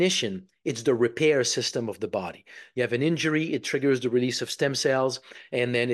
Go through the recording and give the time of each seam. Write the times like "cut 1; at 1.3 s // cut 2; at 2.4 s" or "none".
none